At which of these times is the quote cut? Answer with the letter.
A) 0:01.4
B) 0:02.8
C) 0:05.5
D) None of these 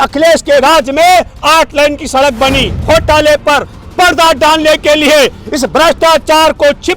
B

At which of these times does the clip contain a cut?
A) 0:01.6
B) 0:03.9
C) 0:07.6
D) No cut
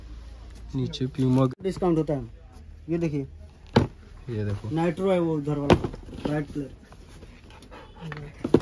A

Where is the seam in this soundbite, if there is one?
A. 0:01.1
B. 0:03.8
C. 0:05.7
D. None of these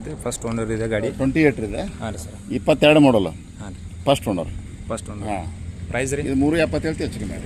A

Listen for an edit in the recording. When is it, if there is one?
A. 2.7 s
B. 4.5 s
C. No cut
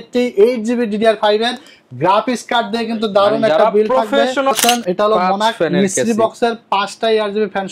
B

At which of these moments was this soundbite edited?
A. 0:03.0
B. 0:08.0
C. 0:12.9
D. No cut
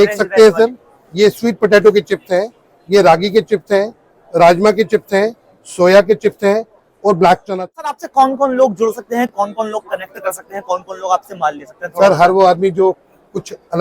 B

